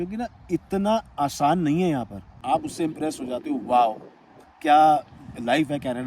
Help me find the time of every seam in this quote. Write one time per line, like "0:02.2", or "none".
0:02.4